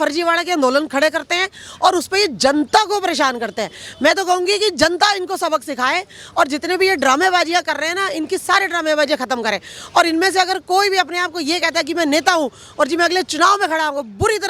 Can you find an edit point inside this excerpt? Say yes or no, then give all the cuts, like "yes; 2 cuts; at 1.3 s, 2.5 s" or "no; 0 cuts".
no; 0 cuts